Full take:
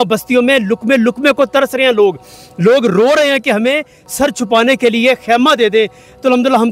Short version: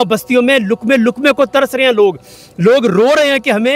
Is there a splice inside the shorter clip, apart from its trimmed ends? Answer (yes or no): no